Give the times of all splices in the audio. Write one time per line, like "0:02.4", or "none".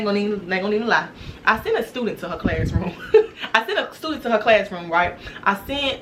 none